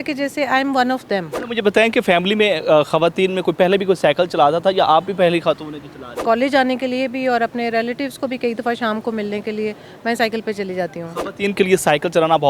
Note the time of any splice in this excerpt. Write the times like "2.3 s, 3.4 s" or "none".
1.4 s, 6.1 s